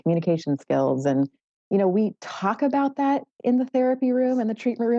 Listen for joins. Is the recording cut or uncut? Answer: uncut